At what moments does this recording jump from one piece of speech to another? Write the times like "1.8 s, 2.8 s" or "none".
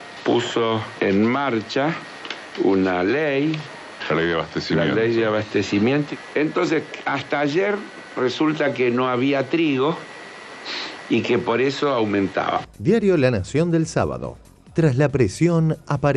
12.7 s